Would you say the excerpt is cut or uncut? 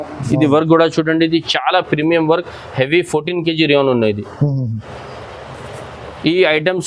uncut